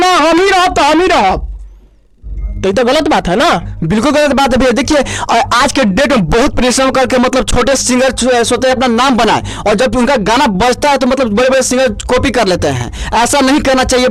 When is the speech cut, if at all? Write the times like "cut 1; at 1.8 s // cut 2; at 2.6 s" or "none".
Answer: none

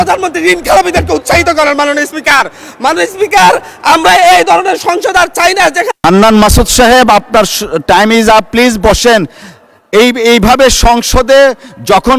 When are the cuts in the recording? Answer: cut 1; at 5.9 s

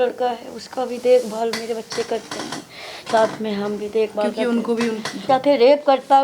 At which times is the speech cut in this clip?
cut 1; at 5.2 s

